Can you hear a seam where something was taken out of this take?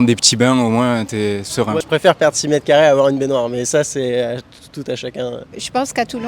yes; 2 cuts; at 1.8 s, 5.4 s

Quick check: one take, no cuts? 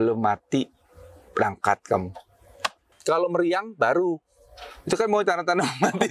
no; 1 cut; at 2.9 s

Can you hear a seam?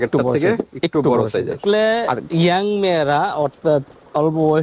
yes; 1 cut; at 1.9 s

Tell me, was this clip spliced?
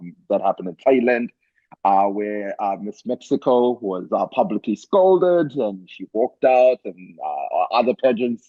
no; 0 cuts

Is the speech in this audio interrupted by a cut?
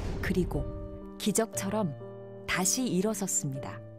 yes; 1 cut; at 1.2 s

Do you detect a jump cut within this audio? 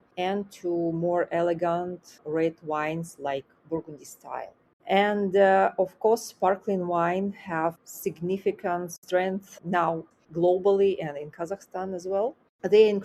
no; 0 cuts

